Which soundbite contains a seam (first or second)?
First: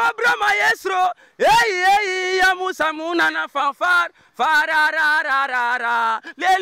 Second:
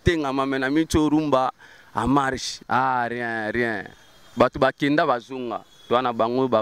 second